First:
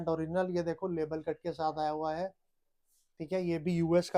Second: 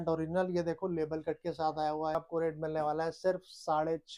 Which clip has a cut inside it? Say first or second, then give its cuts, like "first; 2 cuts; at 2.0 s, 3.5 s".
second; 1 cut; at 2.1 s